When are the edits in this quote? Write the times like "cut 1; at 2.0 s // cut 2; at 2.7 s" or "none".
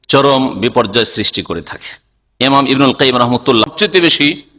cut 1; at 3.6 s